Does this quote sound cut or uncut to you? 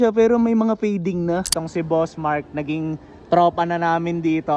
cut